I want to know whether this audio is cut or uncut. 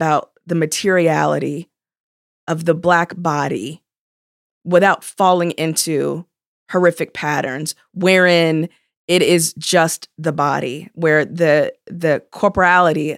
uncut